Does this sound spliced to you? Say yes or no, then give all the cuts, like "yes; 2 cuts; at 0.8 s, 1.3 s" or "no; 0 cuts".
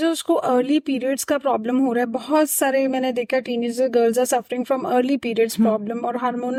no; 0 cuts